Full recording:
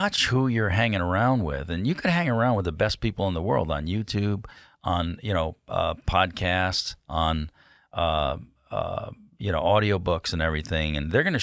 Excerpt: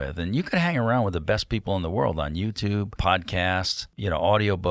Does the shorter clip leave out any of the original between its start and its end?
yes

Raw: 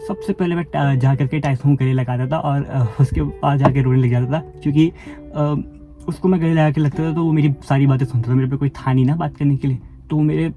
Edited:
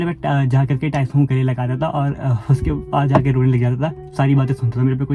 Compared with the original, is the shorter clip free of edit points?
no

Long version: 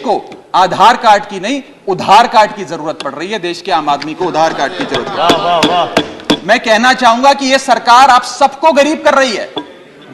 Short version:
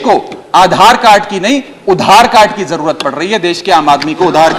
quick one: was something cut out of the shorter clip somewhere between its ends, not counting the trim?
no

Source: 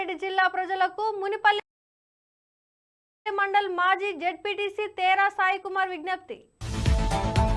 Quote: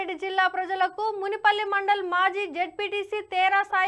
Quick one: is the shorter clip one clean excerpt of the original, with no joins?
no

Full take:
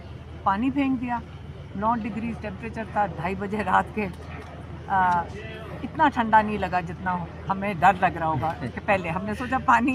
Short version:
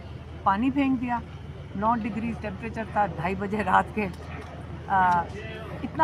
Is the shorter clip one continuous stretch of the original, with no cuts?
yes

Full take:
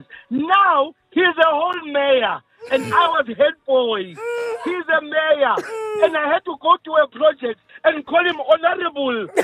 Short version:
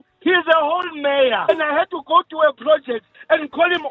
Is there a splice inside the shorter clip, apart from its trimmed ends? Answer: yes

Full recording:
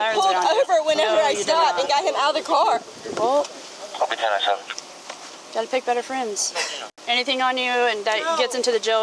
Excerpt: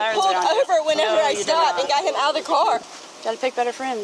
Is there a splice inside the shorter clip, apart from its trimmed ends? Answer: yes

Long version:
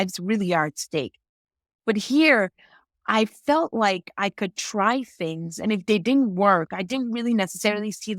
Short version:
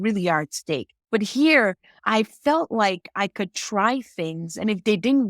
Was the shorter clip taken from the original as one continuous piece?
no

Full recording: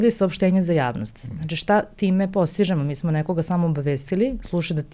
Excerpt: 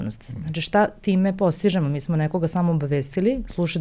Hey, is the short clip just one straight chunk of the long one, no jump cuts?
yes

